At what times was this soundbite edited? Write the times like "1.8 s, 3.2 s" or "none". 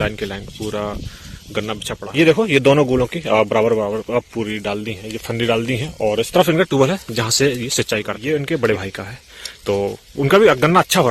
1.9 s, 8.2 s